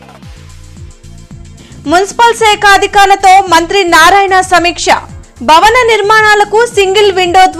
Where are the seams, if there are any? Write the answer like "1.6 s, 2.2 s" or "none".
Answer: none